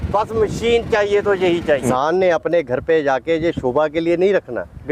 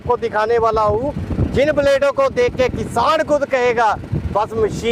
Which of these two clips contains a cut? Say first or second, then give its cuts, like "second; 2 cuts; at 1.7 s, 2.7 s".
first; 1 cut; at 1.8 s